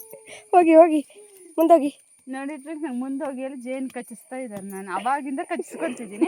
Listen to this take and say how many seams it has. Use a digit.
0